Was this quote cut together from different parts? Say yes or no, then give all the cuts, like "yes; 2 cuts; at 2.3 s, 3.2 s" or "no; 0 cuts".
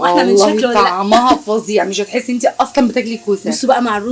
no; 0 cuts